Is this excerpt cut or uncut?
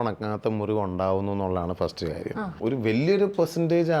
cut